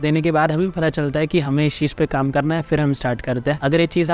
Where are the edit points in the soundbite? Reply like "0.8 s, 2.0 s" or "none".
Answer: none